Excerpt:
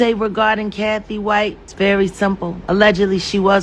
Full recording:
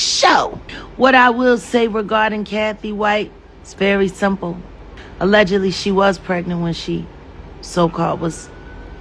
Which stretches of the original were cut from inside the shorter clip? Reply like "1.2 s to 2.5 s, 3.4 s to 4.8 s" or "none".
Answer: 3.4 s to 3.6 s, 4.5 s to 5.0 s